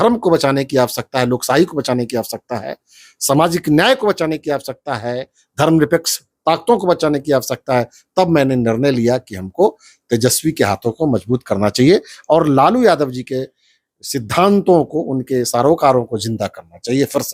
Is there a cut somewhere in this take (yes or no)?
no